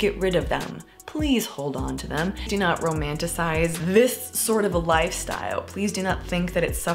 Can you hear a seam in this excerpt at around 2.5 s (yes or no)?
yes